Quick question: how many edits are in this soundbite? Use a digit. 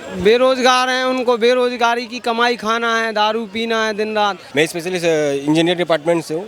1